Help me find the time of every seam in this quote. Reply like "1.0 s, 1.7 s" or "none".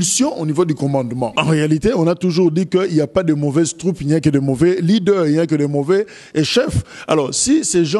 1.2 s